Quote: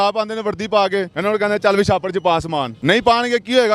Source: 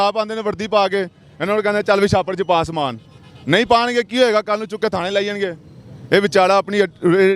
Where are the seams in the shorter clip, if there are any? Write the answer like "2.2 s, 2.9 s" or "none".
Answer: 1.1 s, 2.7 s